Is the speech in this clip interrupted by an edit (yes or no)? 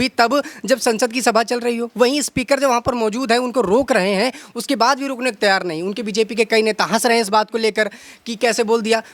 no